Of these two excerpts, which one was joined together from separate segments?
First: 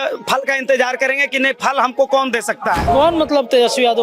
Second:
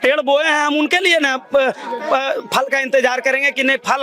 first; 1 cut; at 2.8 s

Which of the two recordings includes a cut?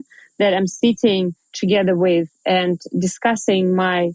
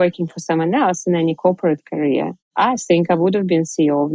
second; 1 cut; at 2.5 s

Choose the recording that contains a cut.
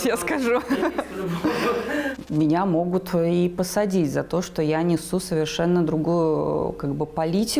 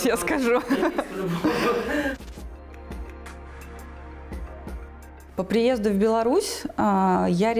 first; 1 cut; at 2.2 s

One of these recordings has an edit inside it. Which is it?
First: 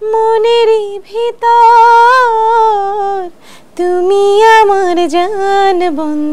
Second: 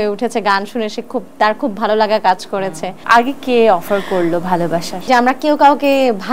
second; 2 cuts; at 3.0 s, 5.1 s

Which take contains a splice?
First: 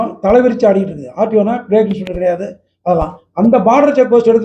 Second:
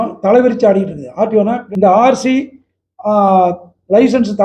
second; 1 cut; at 1.6 s

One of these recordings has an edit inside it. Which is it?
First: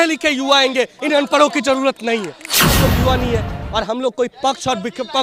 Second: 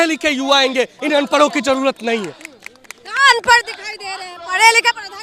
first; 1 cut; at 2.8 s

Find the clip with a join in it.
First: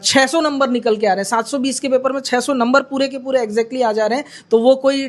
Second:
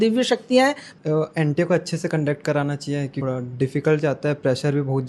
second; 2 cuts; at 0.9 s, 3.2 s

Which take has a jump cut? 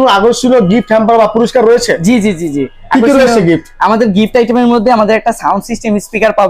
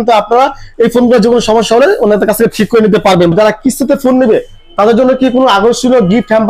second; 1 cut; at 3.3 s

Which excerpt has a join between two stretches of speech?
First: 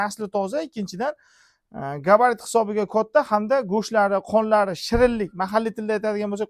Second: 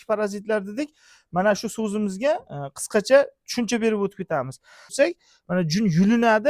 second; 1 cut; at 4.9 s

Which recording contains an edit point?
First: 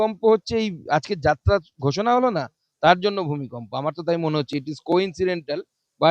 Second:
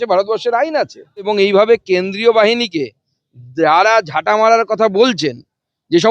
second; 1 cut; at 1.3 s

